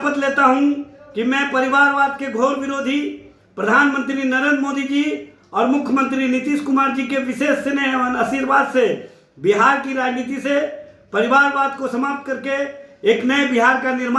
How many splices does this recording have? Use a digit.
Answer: 0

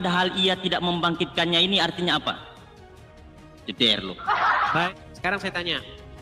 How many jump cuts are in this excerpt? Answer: 1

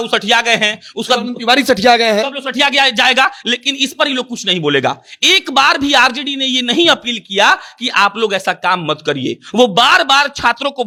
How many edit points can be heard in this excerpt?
0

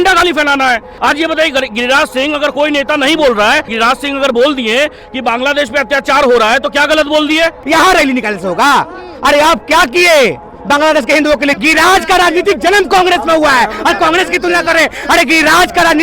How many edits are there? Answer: 4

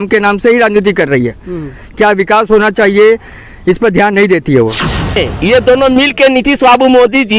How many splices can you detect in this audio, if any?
1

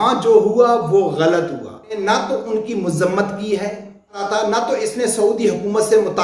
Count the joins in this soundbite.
2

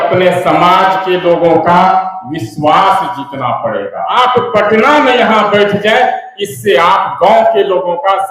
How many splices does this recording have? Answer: 1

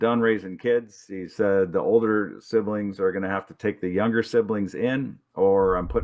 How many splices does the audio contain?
0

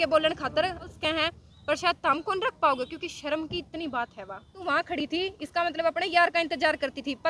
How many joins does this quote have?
2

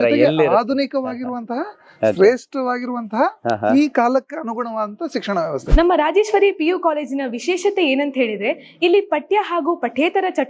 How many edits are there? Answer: 1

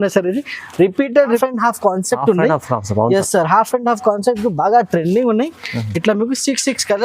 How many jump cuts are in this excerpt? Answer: 1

